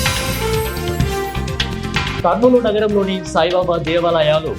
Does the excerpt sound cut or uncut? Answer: cut